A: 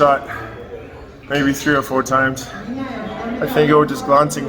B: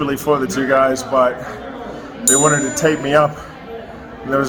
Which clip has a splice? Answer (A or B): A